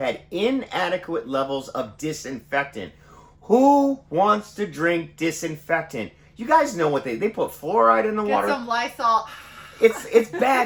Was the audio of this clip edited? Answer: no; 0 cuts

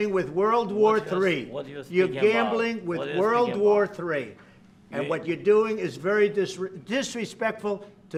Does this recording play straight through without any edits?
yes; 0 cuts

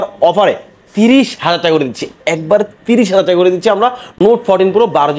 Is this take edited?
no; 0 cuts

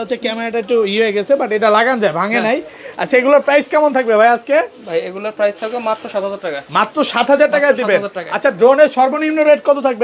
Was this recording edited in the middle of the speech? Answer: no; 0 cuts

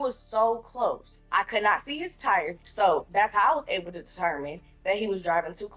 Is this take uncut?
no; 2 cuts; at 1.1 s, 2.6 s

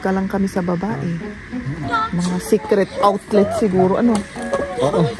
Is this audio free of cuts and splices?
yes; 0 cuts

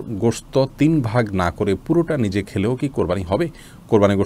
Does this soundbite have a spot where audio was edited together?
no; 0 cuts

